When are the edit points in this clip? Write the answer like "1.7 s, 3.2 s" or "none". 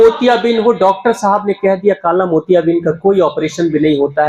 none